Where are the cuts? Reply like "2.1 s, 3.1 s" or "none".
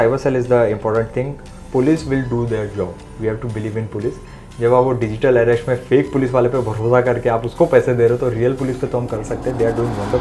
none